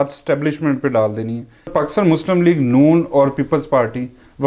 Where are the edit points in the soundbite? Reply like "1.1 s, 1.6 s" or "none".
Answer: 1.7 s